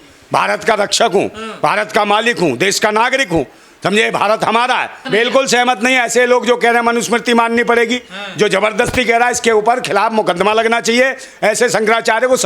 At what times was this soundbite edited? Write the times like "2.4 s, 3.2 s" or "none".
5.0 s